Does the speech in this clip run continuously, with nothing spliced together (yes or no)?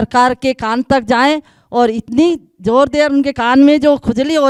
yes